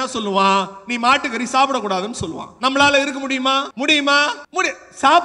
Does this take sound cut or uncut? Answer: cut